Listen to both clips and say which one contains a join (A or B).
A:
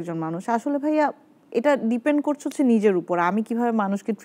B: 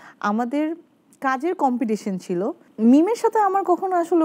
B